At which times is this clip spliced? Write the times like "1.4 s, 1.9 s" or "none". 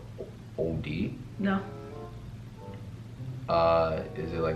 none